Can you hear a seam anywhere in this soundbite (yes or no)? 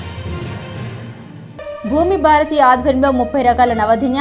yes